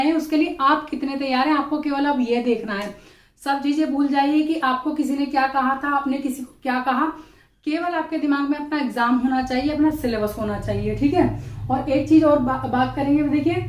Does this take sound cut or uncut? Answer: uncut